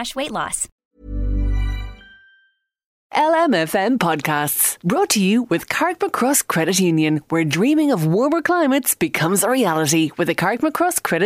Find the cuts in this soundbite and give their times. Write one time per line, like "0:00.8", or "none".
0:03.0